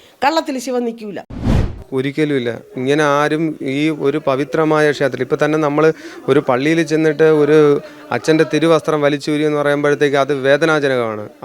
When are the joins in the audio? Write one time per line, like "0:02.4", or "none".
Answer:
0:01.7